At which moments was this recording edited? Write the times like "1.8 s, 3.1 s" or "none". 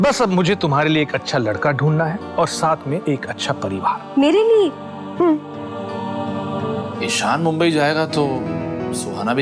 7.0 s